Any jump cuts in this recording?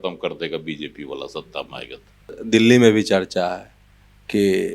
yes; 1 cut; at 2.4 s

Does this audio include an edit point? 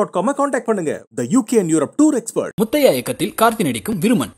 no; 0 cuts

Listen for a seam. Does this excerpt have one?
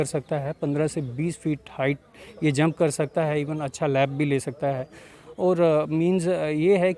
no; 0 cuts

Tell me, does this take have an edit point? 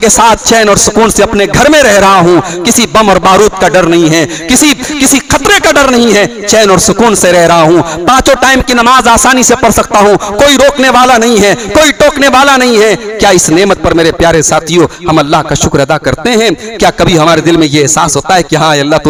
no; 0 cuts

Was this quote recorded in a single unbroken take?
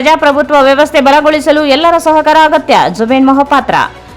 yes; 0 cuts

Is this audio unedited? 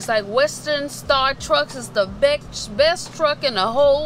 yes; 0 cuts

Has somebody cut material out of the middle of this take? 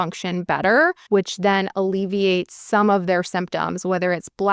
yes; 2 cuts; at 1.0 s, 2.5 s

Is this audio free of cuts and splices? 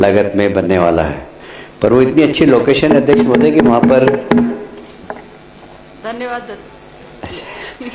yes; 0 cuts

